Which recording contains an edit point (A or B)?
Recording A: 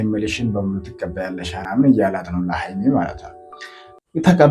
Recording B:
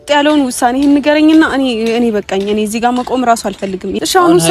A